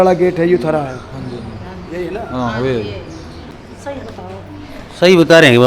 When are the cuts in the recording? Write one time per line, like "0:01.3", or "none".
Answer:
0:03.5